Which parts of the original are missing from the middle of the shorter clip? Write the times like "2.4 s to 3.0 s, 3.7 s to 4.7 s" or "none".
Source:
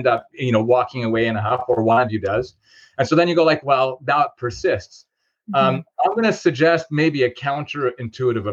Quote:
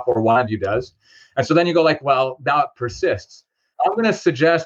5.3 s to 5.9 s